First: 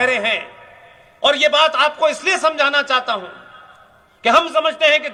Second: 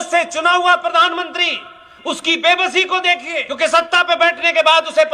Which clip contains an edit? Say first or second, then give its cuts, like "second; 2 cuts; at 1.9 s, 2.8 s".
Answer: second; 1 cut; at 3.4 s